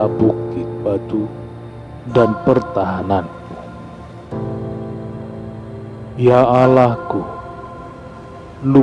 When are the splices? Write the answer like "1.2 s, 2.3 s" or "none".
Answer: 3.8 s, 5.5 s